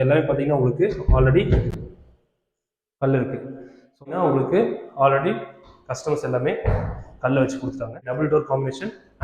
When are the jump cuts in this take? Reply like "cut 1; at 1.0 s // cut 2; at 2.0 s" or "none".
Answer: cut 1; at 4.1 s // cut 2; at 8.0 s